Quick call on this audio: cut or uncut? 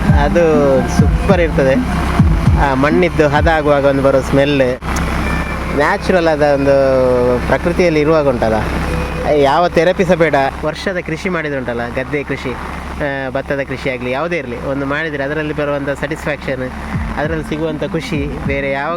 cut